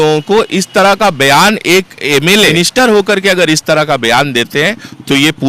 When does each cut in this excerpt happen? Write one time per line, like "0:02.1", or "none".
0:02.5